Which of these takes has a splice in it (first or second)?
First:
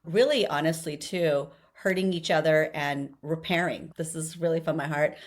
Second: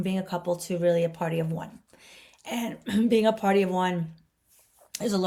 first